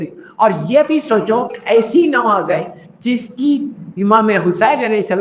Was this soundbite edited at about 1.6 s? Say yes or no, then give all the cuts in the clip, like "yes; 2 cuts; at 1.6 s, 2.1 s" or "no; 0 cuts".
yes; 1 cut; at 1.6 s